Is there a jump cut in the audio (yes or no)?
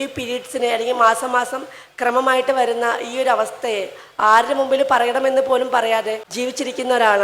yes